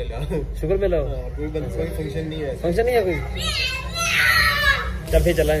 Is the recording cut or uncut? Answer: uncut